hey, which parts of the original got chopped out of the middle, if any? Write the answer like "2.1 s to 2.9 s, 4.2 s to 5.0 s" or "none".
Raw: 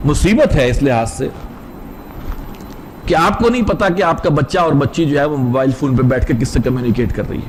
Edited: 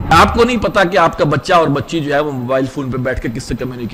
none